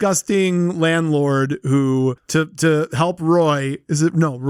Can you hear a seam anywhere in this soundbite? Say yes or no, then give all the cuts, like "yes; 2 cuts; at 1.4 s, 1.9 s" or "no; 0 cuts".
no; 0 cuts